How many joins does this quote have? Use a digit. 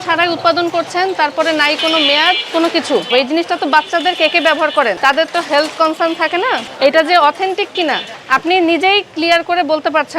4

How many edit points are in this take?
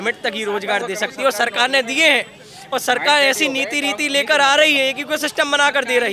0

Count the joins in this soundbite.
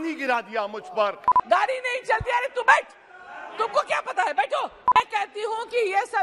2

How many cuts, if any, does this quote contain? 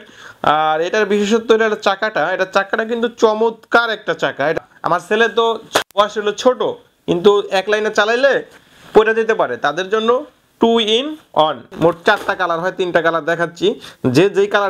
2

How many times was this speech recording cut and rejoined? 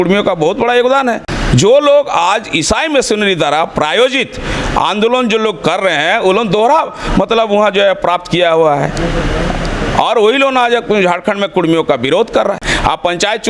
2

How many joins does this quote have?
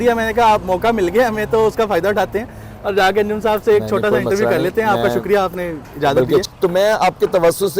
1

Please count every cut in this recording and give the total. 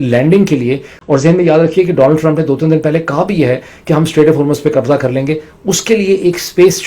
1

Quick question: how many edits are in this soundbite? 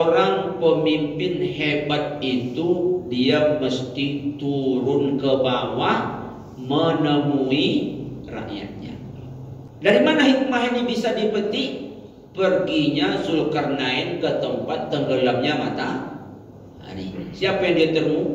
1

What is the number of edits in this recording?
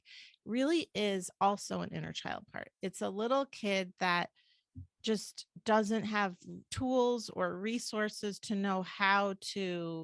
0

